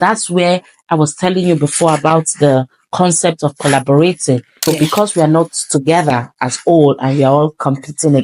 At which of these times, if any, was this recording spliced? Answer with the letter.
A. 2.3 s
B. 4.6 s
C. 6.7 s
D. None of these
B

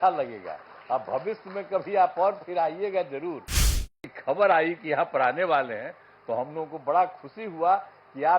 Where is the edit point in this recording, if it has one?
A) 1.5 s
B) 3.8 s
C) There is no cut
B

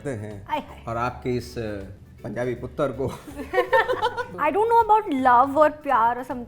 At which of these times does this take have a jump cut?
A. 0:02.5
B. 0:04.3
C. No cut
B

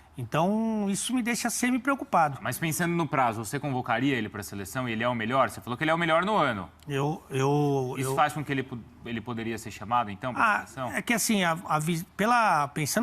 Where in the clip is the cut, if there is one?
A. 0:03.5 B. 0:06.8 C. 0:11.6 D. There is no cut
A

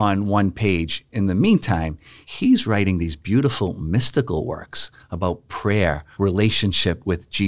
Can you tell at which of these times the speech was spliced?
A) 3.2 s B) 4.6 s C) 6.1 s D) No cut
C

